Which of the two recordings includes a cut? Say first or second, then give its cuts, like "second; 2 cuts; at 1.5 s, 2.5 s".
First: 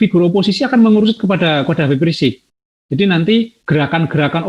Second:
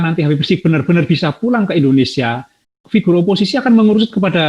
first; 1 cut; at 3.6 s